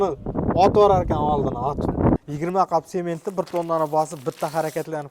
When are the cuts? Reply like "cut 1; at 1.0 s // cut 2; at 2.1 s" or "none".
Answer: cut 1; at 2.2 s